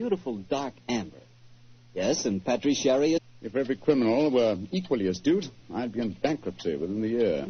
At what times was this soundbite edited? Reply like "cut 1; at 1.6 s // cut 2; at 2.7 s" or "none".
none